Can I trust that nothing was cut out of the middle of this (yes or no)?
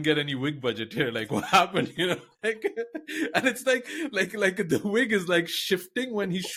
yes